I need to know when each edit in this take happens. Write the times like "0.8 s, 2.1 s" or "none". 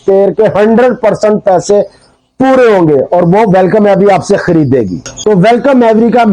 5.0 s